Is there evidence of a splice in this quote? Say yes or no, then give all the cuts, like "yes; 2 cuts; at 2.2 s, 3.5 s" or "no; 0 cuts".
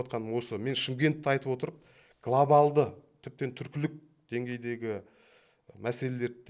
no; 0 cuts